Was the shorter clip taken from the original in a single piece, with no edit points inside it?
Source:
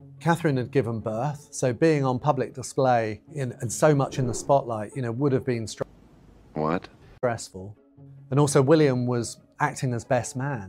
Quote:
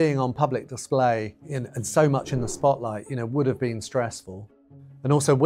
no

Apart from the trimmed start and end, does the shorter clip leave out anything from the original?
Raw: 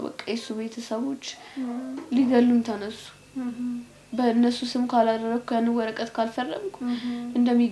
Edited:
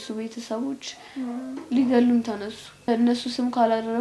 yes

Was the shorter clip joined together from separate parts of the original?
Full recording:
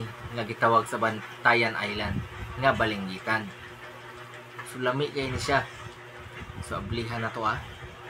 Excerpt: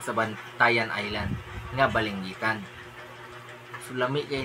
no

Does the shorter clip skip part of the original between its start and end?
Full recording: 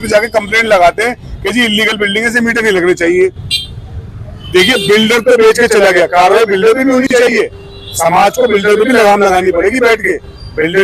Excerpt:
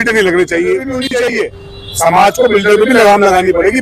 yes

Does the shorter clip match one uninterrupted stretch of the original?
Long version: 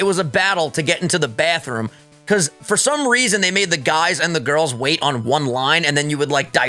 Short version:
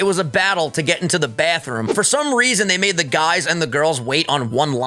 no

